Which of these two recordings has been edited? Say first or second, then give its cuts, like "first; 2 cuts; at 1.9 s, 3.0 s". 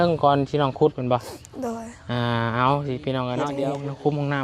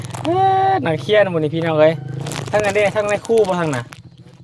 first; 1 cut; at 3.5 s